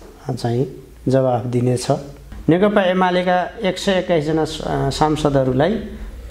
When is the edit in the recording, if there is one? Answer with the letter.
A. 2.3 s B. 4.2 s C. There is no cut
A